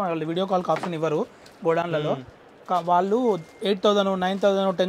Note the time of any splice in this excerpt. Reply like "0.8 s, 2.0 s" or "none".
none